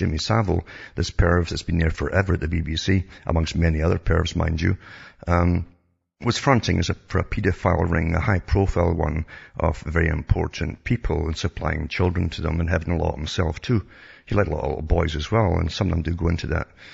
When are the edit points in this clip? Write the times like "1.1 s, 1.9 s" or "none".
14.2 s